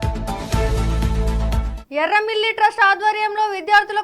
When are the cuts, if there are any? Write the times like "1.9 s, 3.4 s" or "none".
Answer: 1.7 s